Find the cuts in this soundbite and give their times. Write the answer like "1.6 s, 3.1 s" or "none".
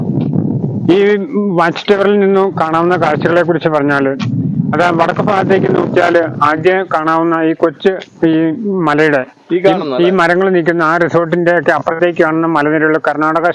none